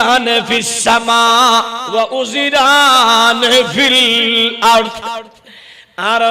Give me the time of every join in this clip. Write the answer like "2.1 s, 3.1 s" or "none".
1.8 s